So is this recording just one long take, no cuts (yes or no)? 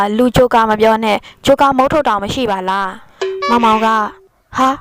no